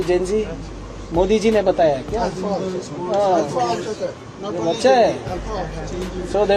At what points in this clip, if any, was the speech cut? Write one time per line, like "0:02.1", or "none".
none